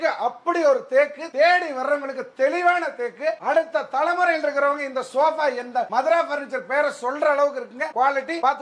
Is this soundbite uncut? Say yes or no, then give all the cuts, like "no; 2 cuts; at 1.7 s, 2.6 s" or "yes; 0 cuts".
yes; 0 cuts